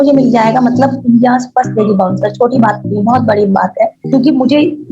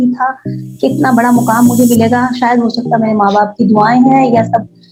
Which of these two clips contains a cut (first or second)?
first